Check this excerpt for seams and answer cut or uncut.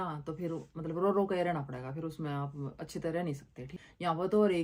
cut